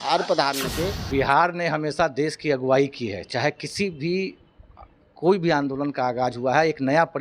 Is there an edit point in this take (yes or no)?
yes